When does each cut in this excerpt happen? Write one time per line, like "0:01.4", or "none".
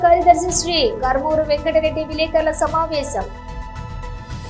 none